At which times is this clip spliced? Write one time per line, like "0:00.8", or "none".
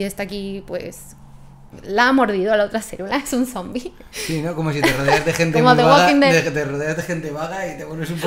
none